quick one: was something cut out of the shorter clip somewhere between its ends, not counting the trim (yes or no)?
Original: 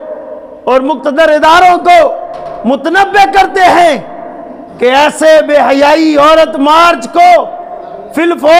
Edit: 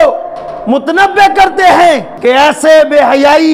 yes